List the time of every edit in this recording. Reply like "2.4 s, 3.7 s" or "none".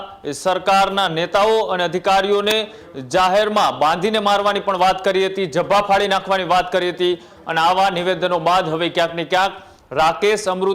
none